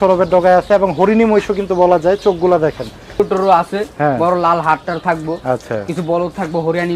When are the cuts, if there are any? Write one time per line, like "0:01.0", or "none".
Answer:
0:03.2